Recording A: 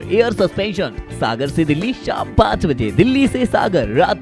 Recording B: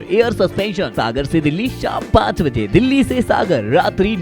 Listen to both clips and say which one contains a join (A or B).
B